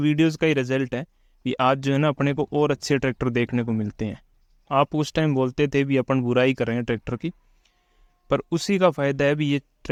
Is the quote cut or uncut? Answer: uncut